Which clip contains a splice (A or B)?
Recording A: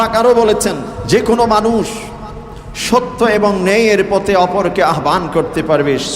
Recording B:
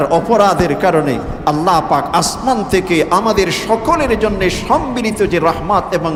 A